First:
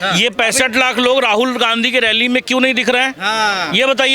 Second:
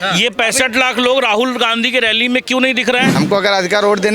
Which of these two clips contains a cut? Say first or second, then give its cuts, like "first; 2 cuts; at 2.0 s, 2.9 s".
second; 1 cut; at 3.1 s